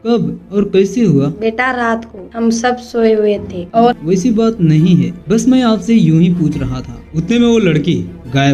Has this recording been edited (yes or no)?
yes